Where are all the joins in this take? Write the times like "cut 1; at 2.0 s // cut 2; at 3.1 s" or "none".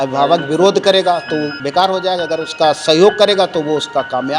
cut 1; at 1.6 s